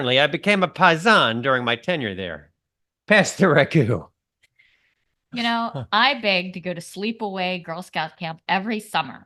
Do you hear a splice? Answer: no; 0 cuts

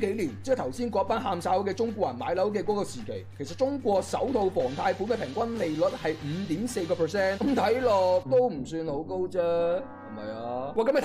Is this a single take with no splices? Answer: yes; 0 cuts

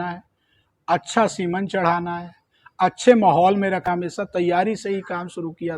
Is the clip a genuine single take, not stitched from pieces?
no; 1 cut; at 3.9 s

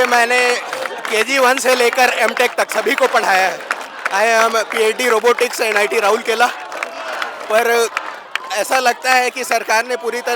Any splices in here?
no; 0 cuts

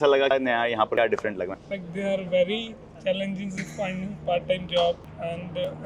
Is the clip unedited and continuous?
yes; 0 cuts

